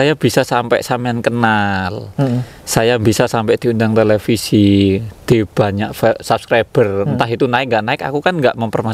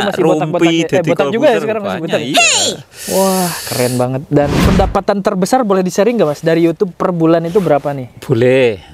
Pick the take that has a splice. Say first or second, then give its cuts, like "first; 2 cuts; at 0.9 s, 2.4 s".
second; 1 cut; at 4.6 s